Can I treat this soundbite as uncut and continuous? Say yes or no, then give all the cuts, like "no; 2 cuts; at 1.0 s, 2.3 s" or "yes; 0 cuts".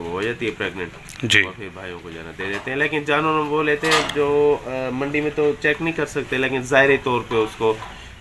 yes; 0 cuts